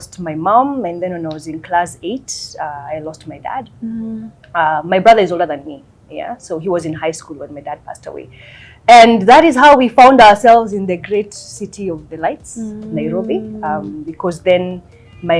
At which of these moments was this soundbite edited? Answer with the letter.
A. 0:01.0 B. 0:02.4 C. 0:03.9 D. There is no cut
D